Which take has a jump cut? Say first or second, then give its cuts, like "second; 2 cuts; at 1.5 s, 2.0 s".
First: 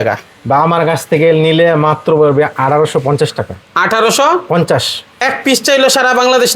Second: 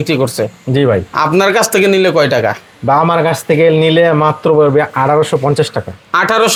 first; 1 cut; at 5.2 s